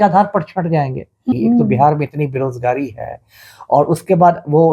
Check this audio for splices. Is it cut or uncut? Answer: cut